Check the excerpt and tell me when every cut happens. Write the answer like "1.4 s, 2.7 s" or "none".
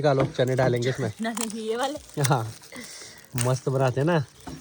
none